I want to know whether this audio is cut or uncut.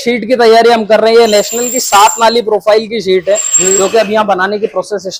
uncut